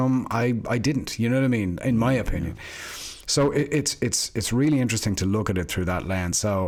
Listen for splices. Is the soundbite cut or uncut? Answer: uncut